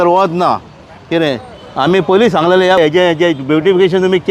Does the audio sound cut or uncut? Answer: cut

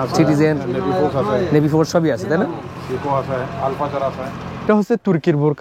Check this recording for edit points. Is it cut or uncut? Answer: cut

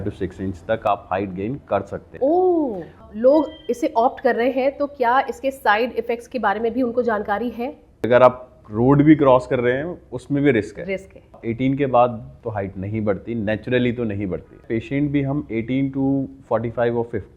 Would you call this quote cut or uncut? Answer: cut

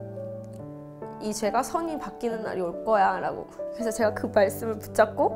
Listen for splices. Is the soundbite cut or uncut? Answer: cut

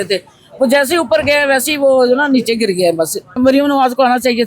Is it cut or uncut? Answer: cut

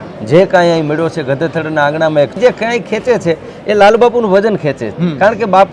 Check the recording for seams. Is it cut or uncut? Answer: cut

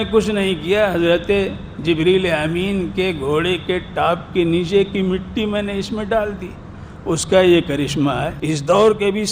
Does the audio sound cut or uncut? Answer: cut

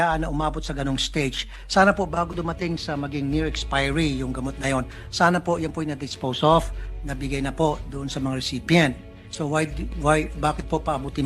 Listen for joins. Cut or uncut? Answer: uncut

